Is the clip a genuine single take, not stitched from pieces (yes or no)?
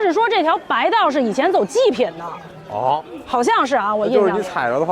yes